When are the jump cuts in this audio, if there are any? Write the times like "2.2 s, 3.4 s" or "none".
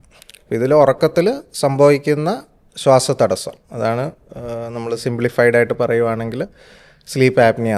none